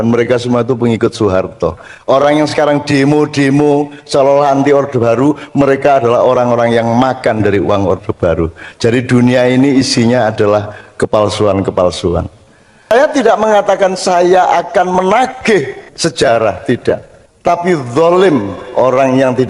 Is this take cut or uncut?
cut